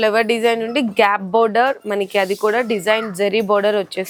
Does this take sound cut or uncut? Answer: uncut